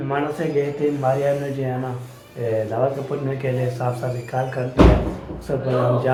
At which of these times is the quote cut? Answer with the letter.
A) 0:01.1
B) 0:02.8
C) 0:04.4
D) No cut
D